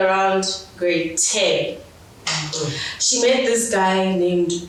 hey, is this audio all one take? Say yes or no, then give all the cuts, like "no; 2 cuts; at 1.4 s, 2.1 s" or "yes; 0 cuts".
yes; 0 cuts